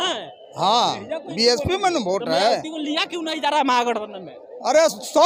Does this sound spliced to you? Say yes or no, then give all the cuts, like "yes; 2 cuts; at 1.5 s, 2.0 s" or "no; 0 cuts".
no; 0 cuts